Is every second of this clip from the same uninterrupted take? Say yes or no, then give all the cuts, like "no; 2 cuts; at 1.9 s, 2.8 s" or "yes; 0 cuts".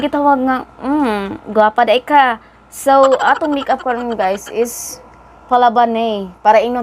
yes; 0 cuts